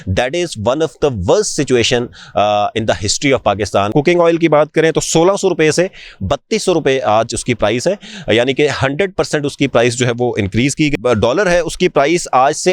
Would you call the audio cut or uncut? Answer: cut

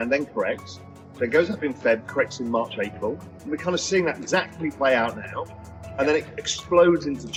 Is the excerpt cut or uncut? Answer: uncut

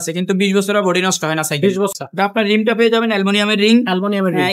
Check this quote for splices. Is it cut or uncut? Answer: cut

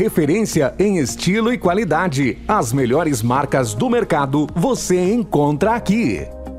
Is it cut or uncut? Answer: uncut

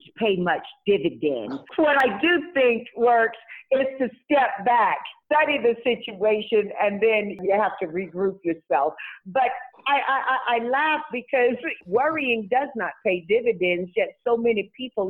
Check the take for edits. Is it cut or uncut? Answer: cut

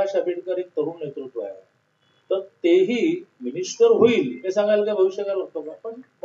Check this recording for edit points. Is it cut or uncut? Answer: uncut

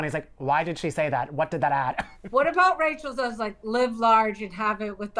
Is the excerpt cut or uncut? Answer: cut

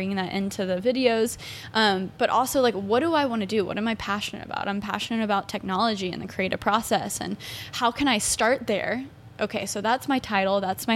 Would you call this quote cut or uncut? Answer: uncut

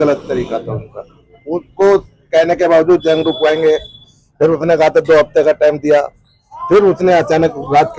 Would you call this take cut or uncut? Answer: uncut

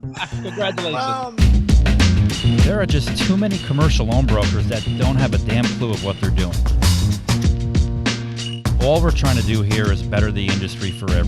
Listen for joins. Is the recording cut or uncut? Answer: cut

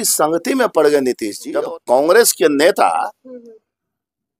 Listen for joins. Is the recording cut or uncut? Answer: cut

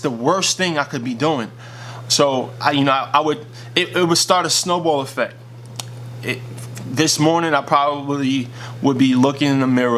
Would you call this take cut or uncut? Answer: uncut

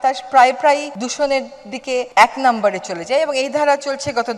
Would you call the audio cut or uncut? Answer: cut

